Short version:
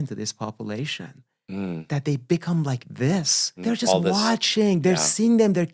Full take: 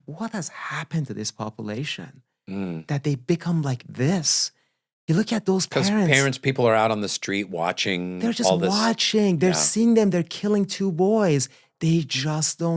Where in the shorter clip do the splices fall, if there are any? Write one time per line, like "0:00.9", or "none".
0:03.5